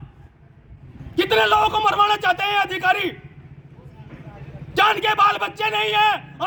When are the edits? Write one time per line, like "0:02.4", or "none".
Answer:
none